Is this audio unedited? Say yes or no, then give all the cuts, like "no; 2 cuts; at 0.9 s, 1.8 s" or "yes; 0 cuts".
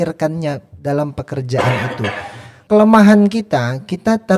no; 1 cut; at 2.5 s